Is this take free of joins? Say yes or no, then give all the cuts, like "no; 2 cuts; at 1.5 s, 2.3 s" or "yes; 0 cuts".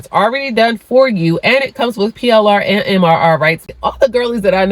no; 1 cut; at 3.7 s